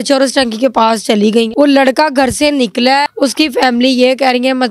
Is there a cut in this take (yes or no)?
yes